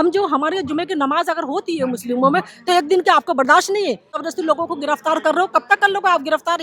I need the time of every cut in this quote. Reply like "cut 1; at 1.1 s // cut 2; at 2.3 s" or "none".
cut 1; at 4.1 s